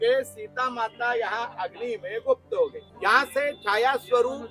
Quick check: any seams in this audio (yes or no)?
yes